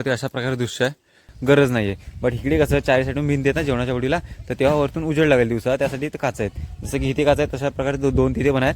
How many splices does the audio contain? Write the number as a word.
one